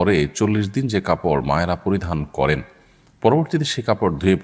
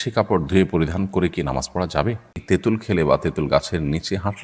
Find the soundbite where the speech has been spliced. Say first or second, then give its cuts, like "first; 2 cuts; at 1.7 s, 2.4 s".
second; 1 cut; at 2.4 s